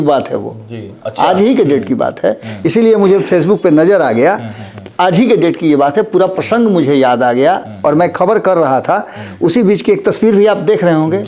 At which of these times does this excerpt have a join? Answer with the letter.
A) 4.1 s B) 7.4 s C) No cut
C